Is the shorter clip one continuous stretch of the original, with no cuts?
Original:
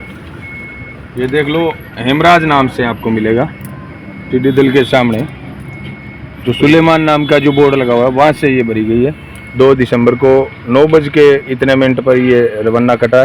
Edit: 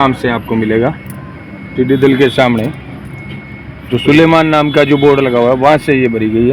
yes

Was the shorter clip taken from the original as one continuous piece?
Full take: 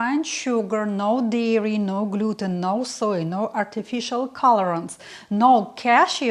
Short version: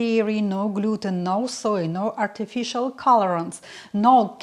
yes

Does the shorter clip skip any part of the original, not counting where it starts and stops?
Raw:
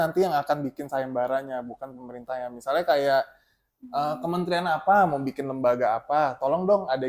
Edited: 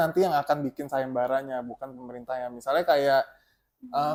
no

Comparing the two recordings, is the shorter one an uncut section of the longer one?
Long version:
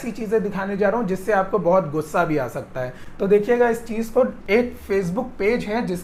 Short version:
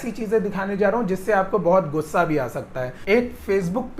no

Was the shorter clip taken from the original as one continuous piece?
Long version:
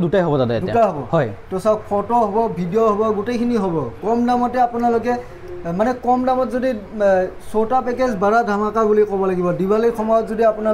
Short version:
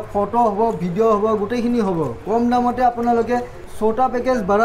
no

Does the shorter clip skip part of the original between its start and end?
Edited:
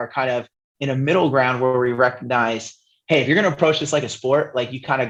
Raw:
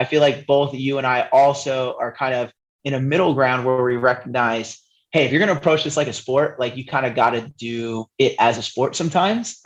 no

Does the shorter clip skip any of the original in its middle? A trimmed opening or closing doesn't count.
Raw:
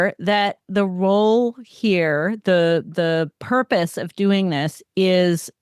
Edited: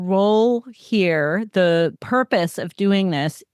yes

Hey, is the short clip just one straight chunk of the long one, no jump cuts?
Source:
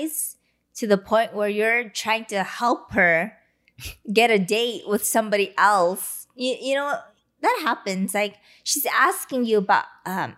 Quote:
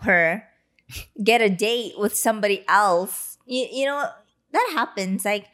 yes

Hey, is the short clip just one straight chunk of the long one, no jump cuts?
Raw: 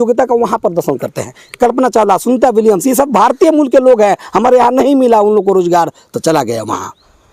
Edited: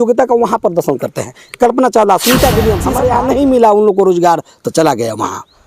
no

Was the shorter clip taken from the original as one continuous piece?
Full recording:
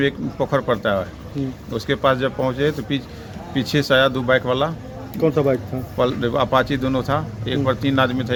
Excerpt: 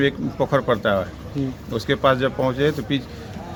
yes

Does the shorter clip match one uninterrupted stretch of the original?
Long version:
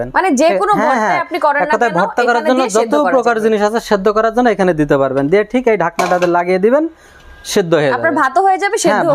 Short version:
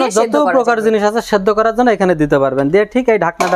yes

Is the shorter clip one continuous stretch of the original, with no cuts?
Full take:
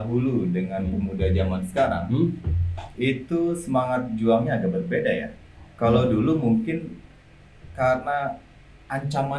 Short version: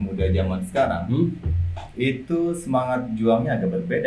yes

